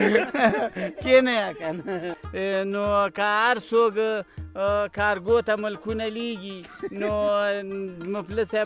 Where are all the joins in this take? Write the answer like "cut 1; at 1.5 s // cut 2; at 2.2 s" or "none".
cut 1; at 2.2 s